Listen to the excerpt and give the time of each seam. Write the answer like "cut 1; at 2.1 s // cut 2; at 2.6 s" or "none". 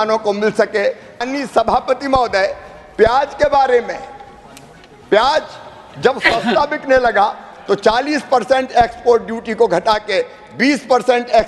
cut 1; at 1.2 s